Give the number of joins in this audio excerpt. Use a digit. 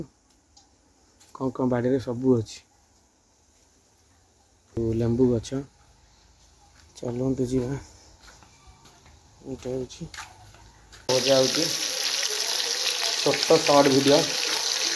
2